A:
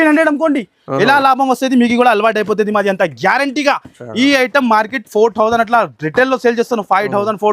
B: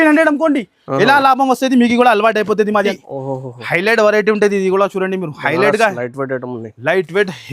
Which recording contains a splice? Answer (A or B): B